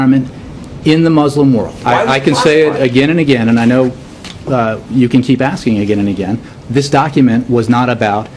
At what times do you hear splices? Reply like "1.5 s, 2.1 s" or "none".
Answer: none